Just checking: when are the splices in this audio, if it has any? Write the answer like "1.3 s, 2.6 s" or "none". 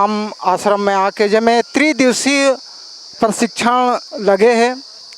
4.1 s